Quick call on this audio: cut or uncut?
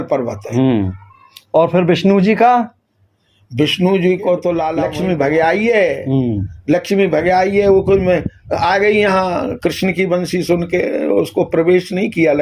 cut